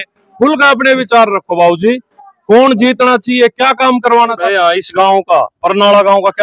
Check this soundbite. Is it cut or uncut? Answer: cut